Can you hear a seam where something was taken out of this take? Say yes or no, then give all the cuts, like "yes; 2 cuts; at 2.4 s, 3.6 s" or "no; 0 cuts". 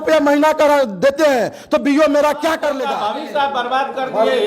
yes; 1 cut; at 2.8 s